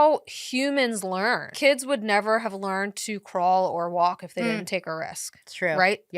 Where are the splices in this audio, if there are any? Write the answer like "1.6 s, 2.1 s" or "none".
1.5 s